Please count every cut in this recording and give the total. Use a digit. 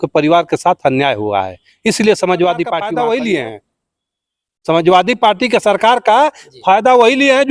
1